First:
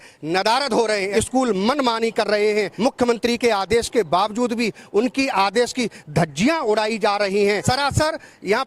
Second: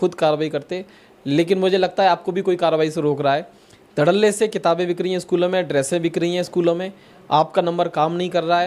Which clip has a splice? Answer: first; 3 cuts; at 1.1 s, 2.7 s, 7.6 s

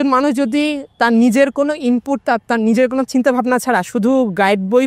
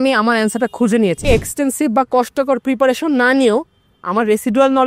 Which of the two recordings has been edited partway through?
second; 1 cut; at 1.2 s

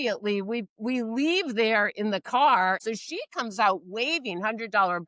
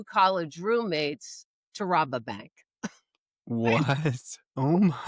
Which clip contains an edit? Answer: first; 1 cut; at 2.8 s

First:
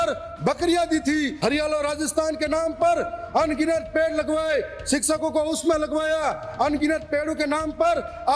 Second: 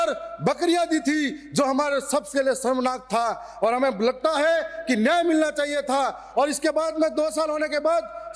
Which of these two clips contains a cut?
first; 1 cut; at 1.3 s

